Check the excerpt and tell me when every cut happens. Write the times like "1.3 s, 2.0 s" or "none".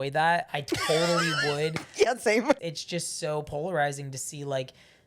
2.6 s